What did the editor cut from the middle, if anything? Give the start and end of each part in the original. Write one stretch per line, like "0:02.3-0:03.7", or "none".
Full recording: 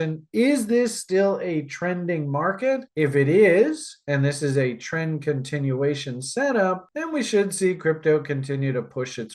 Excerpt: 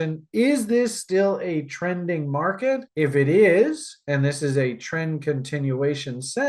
none